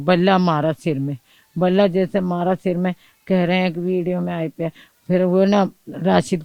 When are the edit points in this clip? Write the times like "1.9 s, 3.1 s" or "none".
none